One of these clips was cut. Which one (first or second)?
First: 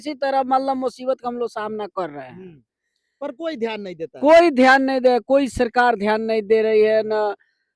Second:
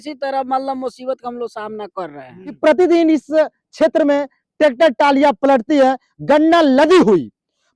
second